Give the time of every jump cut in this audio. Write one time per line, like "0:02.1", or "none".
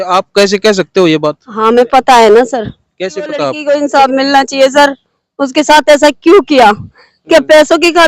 0:03.6

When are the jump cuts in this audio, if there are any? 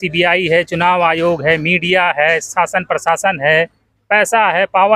none

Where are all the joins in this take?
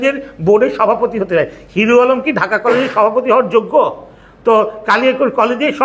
none

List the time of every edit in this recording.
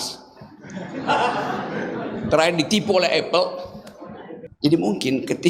0:04.4

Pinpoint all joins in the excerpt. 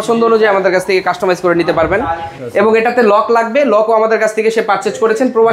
0:02.4

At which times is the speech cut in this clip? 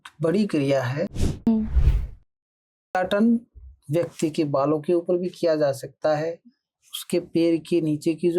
none

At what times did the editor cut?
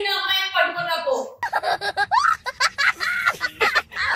0:01.3

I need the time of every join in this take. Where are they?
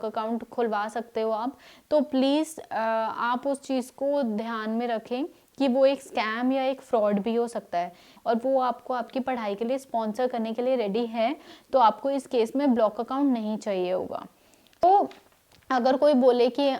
0:08.1
0:14.8

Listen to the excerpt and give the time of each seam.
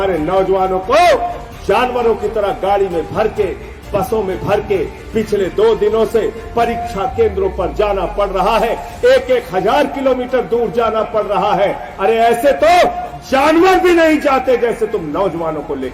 none

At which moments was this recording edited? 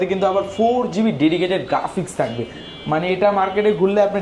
none

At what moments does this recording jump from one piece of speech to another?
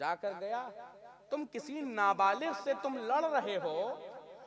none

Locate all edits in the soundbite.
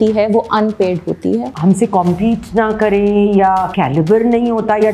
0:01.5
0:03.7

